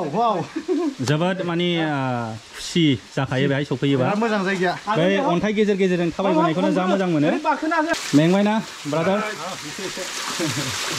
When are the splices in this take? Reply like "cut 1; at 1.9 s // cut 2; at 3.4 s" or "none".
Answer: cut 1; at 8.0 s